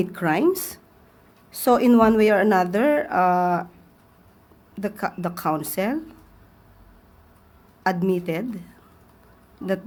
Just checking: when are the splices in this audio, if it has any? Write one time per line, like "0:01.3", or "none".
none